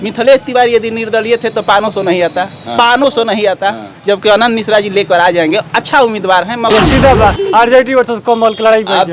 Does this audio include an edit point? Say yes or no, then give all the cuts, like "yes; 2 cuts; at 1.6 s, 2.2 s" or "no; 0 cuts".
yes; 1 cut; at 6.7 s